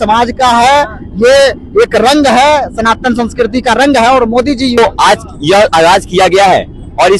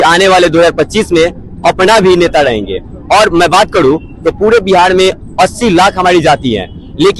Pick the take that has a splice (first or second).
first